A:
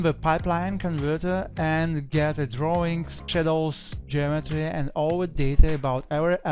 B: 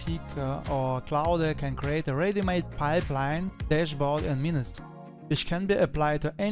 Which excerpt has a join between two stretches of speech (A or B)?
A